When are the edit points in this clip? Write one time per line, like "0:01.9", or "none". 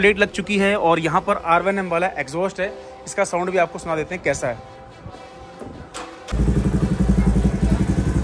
0:06.3